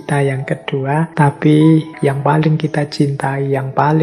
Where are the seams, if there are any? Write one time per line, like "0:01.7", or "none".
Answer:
0:01.1
0:01.9